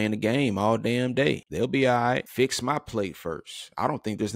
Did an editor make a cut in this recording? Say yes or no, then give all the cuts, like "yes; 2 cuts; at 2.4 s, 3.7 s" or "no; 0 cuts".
yes; 2 cuts; at 1.5 s, 2.3 s